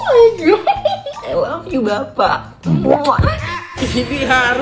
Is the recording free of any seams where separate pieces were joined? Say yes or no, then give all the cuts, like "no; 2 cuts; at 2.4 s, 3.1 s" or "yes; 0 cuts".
no; 1 cut; at 1.2 s